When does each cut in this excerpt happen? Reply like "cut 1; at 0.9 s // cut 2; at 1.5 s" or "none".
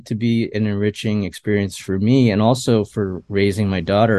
cut 1; at 3.2 s